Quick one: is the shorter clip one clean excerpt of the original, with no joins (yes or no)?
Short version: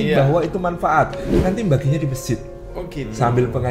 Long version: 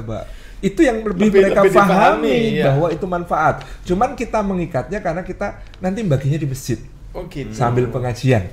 no